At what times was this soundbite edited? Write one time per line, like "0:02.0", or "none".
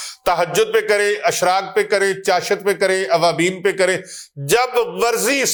none